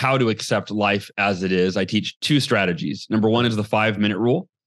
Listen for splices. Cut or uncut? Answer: uncut